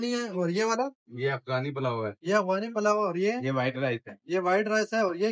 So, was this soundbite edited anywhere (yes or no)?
no